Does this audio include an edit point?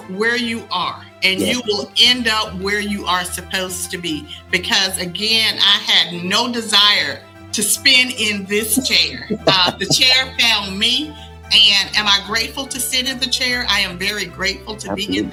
no; 0 cuts

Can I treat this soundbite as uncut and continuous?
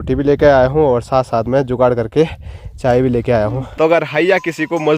no; 1 cut; at 3.7 s

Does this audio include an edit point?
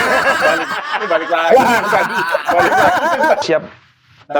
yes; 1 cut; at 3.4 s

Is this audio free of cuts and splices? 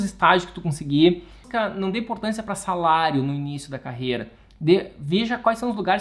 no; 1 cut; at 1.5 s

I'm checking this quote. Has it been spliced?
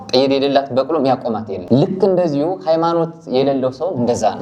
yes; 1 cut; at 1.5 s

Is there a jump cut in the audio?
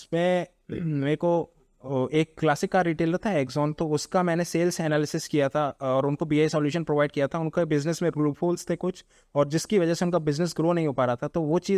no; 0 cuts

